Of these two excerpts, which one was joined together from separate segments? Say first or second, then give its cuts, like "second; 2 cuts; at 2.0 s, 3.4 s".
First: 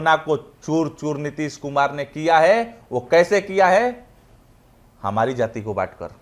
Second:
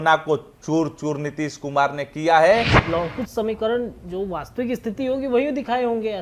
second; 1 cut; at 2.8 s